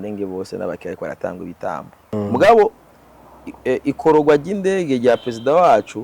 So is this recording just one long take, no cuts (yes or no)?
no